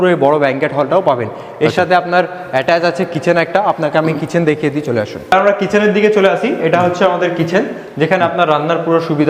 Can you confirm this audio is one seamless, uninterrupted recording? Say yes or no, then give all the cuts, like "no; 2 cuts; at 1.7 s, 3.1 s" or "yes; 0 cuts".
yes; 0 cuts